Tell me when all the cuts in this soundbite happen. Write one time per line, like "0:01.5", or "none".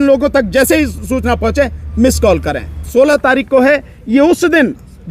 0:02.9